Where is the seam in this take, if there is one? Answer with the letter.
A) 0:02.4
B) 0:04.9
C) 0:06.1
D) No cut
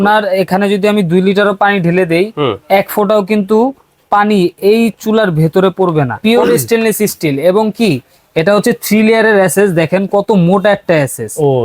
C